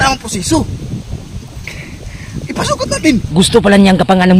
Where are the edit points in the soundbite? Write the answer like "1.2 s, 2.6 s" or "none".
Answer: 3.3 s